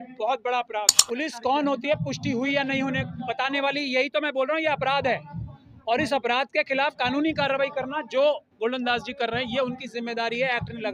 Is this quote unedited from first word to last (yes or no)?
no